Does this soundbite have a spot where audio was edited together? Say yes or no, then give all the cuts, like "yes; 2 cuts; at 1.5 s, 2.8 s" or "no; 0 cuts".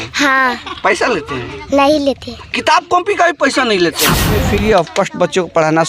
yes; 1 cut; at 4.2 s